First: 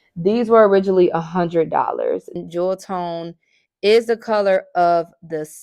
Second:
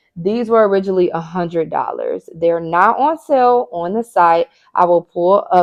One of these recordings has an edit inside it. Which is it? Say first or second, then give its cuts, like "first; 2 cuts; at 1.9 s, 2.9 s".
first; 1 cut; at 2.3 s